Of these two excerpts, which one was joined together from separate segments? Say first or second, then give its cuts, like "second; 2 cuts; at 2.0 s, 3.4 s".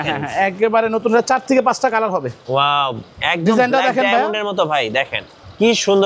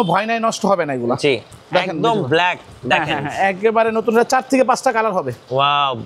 second; 1 cut; at 1.5 s